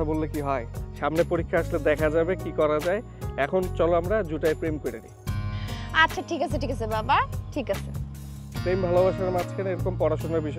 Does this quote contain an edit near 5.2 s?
no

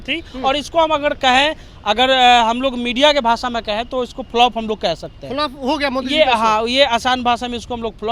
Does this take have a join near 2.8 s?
no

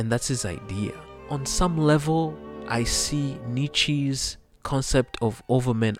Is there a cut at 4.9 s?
no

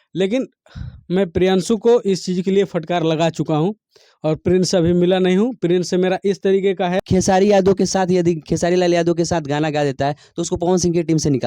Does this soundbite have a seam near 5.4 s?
no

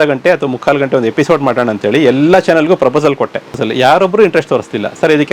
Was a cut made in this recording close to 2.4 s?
no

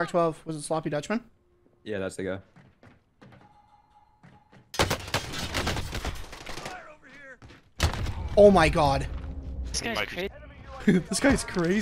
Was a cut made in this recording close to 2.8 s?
no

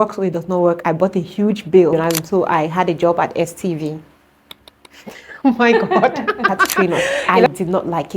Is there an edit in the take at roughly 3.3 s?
no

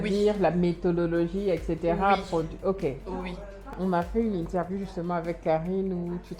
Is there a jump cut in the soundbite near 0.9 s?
no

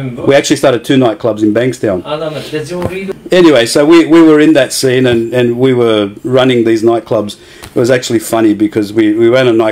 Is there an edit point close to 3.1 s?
yes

